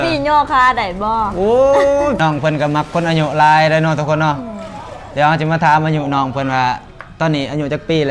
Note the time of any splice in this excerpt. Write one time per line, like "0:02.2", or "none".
0:02.2